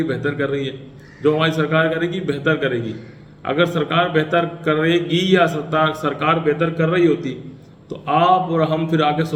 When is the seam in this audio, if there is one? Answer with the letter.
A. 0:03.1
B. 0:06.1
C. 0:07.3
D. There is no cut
D